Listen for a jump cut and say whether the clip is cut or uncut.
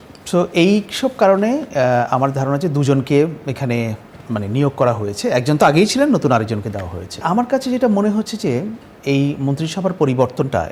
cut